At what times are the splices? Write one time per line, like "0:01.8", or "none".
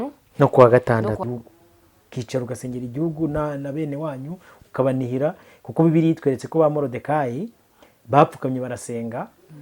0:01.2